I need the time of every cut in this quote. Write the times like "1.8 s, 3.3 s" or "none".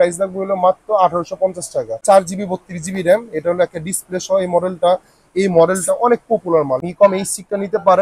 2.0 s, 6.9 s